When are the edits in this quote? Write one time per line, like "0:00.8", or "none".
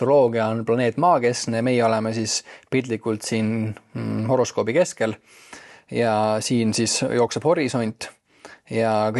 none

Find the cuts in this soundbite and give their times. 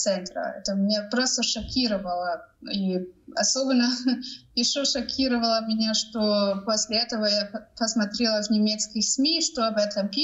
none

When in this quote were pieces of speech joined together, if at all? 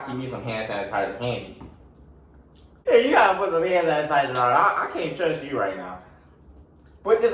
0:02.8

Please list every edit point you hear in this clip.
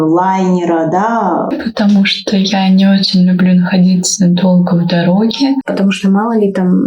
0:01.5
0:05.7

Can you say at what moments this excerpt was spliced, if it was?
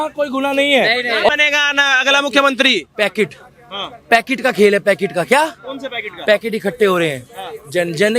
0:01.3

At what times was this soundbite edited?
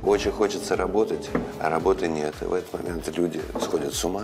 none

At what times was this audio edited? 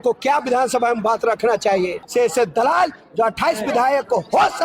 0:02.0

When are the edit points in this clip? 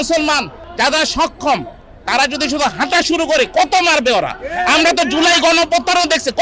none

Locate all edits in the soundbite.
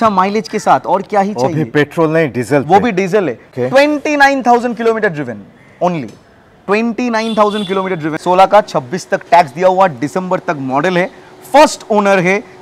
0:03.4
0:08.2

